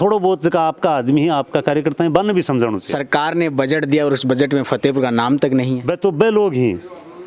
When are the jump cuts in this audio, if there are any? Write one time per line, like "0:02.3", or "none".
0:02.9
0:05.8